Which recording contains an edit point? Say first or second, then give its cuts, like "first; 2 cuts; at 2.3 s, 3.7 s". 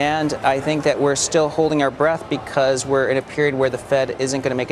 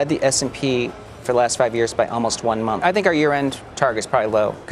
second; 1 cut; at 2.8 s